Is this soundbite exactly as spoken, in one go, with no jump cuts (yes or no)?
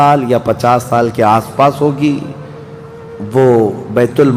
yes